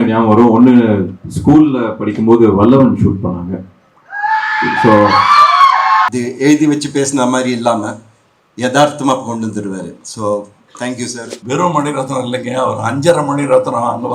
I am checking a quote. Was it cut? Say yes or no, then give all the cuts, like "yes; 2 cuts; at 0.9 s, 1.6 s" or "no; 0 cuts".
yes; 2 cuts; at 6.1 s, 11.3 s